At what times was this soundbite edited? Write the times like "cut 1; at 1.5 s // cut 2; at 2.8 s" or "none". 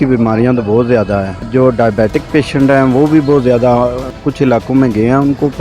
cut 1; at 1.5 s // cut 2; at 4.2 s

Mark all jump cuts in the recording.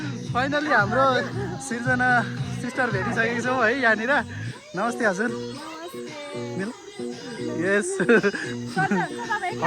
none

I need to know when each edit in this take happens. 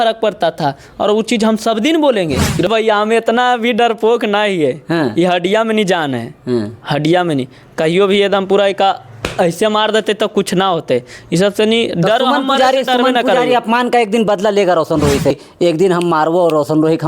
cut 1; at 2.7 s // cut 2; at 15.4 s

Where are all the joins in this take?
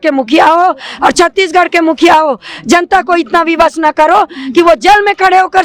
none

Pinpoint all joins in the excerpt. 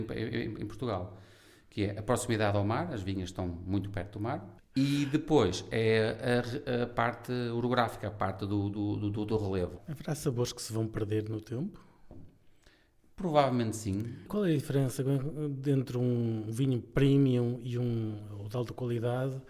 cut 1; at 4.5 s // cut 2; at 9.8 s // cut 3; at 14.3 s

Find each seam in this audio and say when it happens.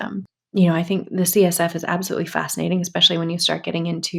none

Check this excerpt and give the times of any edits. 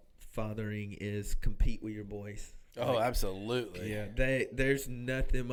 none

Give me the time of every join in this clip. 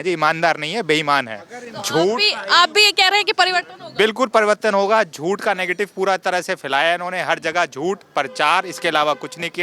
none

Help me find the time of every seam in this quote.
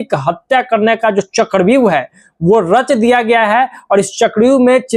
none

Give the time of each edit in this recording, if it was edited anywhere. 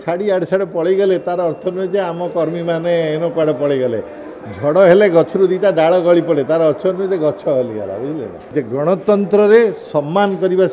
cut 1; at 8.4 s

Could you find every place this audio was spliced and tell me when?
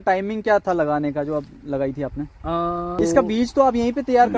cut 1; at 3.0 s

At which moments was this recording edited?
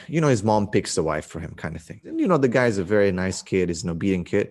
cut 1; at 2.0 s

